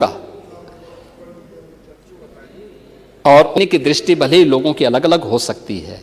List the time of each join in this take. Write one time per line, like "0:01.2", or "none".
0:03.6

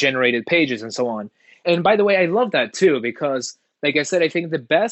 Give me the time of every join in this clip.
none

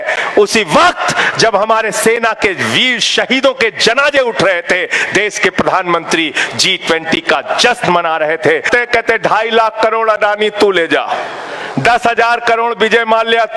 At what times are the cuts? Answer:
0:08.7

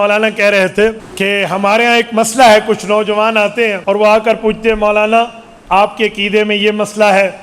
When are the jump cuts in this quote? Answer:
0:01.1
0:03.8

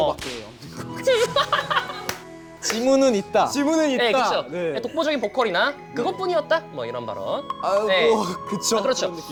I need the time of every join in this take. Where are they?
none

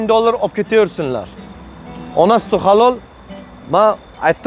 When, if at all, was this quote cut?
none

